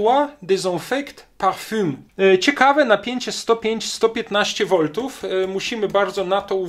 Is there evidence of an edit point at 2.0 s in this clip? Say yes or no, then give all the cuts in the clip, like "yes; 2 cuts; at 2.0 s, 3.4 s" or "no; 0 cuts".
yes; 1 cut; at 2.0 s